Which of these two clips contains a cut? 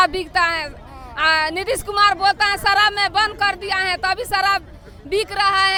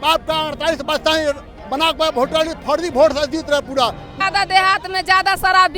second; 1 cut; at 4.2 s

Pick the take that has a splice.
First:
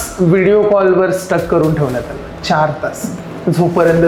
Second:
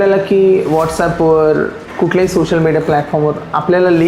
second; 1 cut; at 1.8 s

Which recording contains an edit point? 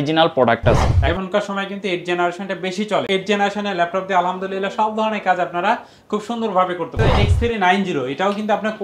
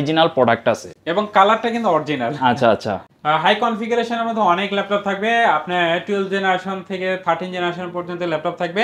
first; 3 cuts; at 1.0 s, 3.1 s, 7.0 s

